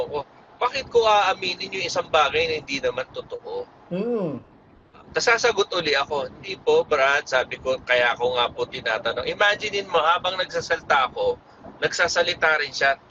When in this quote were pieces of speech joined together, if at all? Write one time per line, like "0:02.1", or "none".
none